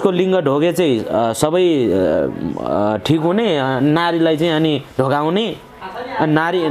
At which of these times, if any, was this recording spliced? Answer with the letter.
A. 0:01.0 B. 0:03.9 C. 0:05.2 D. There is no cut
D